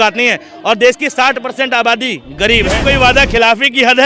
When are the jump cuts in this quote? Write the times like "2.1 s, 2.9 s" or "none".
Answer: 2.8 s